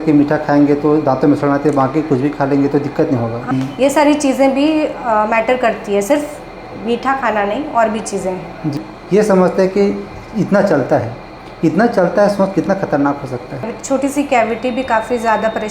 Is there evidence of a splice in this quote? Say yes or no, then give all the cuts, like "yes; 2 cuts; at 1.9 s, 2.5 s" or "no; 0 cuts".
yes; 3 cuts; at 3.5 s, 8.8 s, 13.8 s